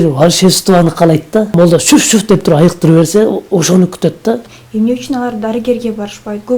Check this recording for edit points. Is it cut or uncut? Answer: cut